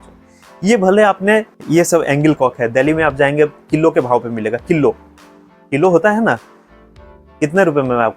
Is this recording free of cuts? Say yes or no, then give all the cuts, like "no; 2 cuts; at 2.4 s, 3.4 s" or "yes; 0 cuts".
no; 1 cut; at 1.6 s